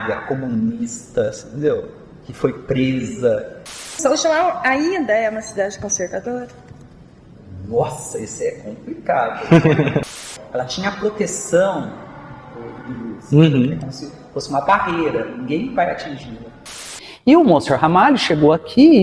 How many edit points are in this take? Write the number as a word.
three